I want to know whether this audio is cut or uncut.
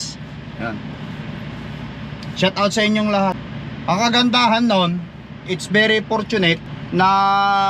cut